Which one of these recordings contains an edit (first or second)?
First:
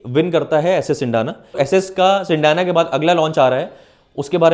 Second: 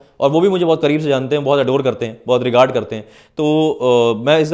first